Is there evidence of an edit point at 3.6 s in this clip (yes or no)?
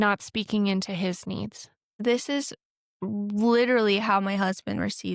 no